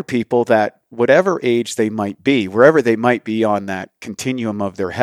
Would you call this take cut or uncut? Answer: uncut